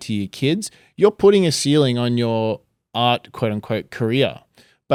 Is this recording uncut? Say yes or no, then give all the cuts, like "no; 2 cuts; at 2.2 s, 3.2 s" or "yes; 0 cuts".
yes; 0 cuts